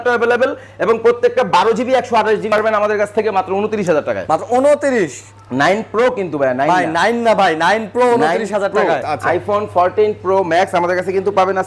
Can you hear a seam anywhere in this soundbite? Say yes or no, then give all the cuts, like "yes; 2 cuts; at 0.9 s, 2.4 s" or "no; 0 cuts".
yes; 2 cuts; at 2.5 s, 9.0 s